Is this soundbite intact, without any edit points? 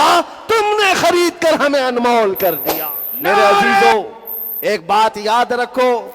no; 1 cut; at 3.9 s

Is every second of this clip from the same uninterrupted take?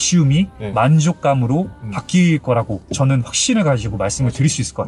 yes; 0 cuts

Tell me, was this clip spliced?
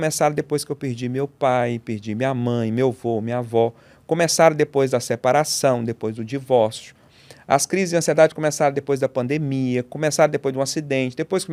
no; 0 cuts

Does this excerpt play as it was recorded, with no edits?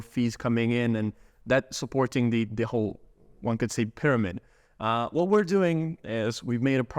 yes; 0 cuts

